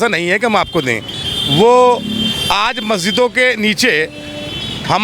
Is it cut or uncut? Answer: uncut